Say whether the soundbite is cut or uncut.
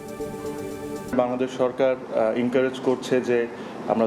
cut